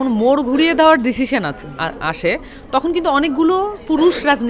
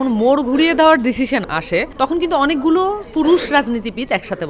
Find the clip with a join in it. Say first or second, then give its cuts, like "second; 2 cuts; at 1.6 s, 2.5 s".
second; 1 cut; at 1.8 s